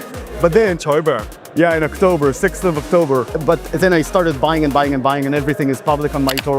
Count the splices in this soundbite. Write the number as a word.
one